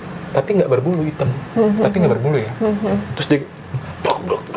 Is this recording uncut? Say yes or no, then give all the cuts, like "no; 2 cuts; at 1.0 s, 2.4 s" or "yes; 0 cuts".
yes; 0 cuts